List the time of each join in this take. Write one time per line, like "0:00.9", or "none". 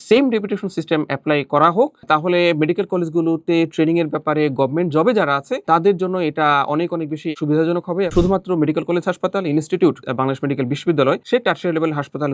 0:02.0
0:07.3
0:08.1
0:11.2